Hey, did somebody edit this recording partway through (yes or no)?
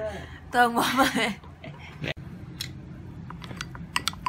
yes